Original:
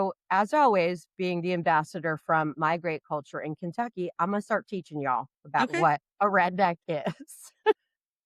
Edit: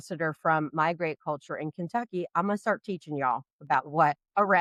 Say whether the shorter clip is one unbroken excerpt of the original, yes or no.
yes